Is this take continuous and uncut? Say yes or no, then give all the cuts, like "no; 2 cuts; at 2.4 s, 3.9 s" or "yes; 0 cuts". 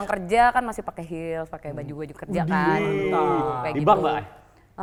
yes; 0 cuts